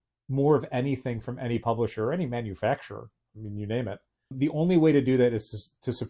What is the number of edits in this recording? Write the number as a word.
zero